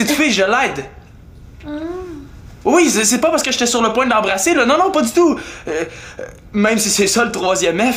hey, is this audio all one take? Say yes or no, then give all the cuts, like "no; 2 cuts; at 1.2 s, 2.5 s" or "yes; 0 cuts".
yes; 0 cuts